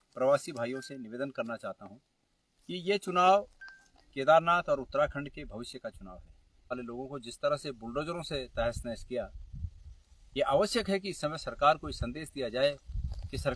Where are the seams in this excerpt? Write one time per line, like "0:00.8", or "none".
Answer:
0:06.8